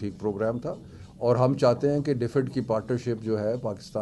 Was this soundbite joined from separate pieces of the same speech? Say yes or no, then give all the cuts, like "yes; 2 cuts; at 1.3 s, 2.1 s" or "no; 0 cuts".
no; 0 cuts